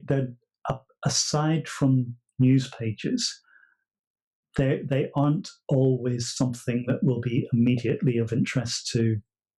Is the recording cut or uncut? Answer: uncut